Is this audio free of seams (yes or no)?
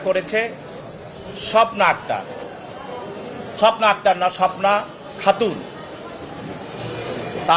yes